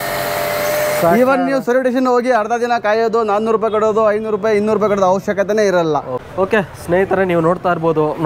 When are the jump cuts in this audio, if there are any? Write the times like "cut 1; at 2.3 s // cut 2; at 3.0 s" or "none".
cut 1; at 6.2 s